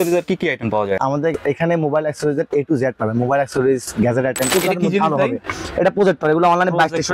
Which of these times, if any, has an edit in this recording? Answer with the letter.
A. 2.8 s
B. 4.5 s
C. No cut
B